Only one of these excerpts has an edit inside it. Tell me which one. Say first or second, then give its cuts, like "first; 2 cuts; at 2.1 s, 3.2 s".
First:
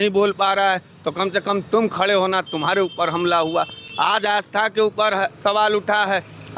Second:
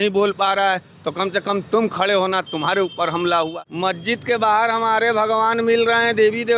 second; 1 cut; at 3.5 s